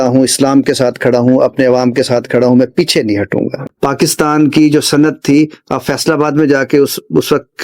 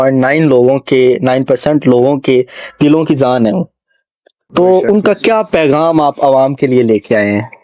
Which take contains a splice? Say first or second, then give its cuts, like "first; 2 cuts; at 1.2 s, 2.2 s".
first; 1 cut; at 3.6 s